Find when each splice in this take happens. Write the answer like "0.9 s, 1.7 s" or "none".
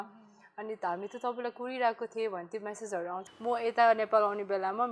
3.2 s